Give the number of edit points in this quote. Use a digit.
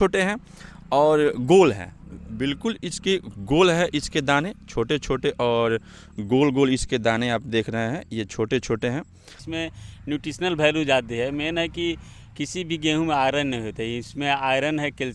1